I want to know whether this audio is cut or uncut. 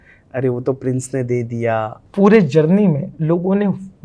cut